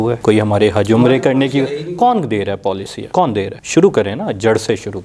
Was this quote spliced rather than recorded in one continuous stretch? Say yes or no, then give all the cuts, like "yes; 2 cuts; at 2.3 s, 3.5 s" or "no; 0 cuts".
no; 0 cuts